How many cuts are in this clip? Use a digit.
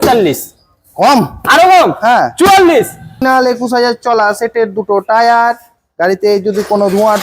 1